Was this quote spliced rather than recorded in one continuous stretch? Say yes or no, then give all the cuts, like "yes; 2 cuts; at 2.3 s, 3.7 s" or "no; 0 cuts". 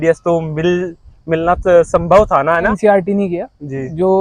yes; 1 cut; at 2.7 s